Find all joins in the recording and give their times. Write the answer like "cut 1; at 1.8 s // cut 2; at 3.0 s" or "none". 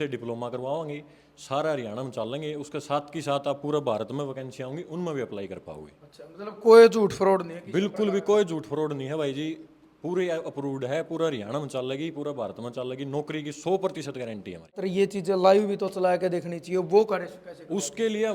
cut 1; at 14.8 s

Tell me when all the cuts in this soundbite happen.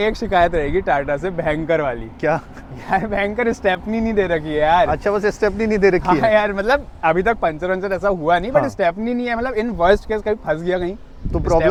none

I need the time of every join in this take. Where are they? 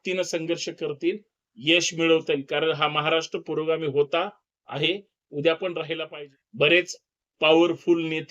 cut 1; at 6.0 s

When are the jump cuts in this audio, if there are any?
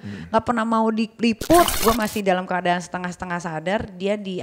cut 1; at 1.7 s

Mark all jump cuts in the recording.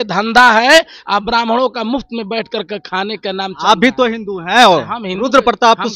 none

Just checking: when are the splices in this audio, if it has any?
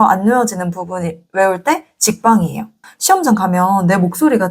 cut 1; at 2.8 s

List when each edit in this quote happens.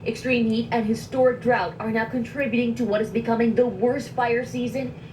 cut 1; at 3.2 s

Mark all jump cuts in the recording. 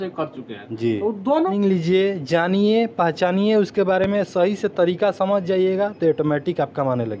cut 1; at 1.5 s

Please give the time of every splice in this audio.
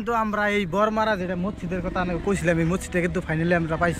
none

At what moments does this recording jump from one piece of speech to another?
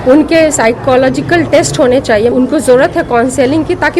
cut 1; at 2.3 s

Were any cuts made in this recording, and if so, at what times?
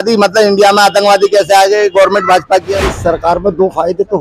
cut 1; at 2.9 s

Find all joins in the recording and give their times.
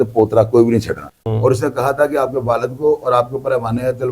cut 1; at 1.2 s

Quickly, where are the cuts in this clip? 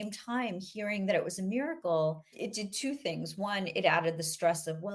cut 1; at 2.3 s

